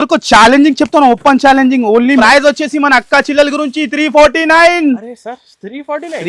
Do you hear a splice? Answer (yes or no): yes